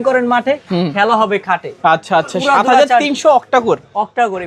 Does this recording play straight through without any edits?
yes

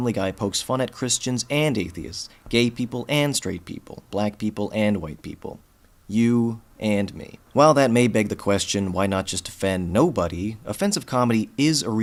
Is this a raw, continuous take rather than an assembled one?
yes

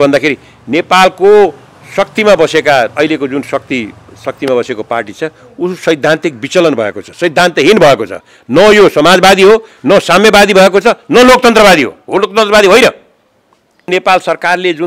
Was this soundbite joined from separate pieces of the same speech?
yes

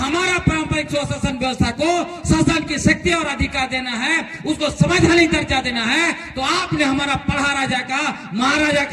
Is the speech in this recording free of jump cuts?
yes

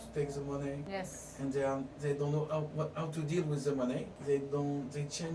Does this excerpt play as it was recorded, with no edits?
no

